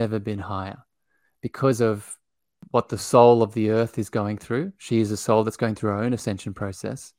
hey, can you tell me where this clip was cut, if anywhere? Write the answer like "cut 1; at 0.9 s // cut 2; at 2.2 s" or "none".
cut 1; at 2.6 s